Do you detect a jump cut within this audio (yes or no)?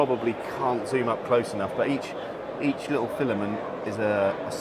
no